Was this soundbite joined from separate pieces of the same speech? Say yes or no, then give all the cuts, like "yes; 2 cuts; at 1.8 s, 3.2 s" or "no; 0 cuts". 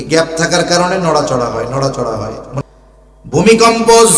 yes; 1 cut; at 2.6 s